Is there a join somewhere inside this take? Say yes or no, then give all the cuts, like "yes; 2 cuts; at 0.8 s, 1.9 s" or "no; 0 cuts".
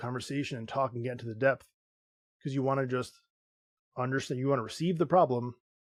no; 0 cuts